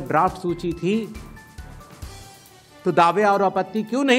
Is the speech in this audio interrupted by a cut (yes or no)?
no